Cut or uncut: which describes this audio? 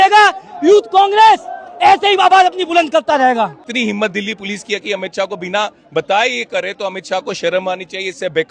cut